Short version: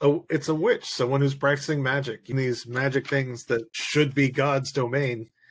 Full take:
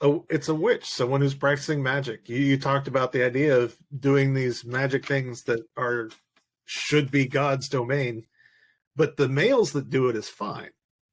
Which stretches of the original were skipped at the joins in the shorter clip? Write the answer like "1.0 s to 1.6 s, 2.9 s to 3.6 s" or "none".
2.3 s to 4.3 s, 5.7 s to 6.7 s